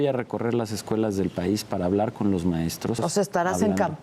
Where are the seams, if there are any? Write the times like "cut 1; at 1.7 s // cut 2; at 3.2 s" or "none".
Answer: cut 1; at 3.0 s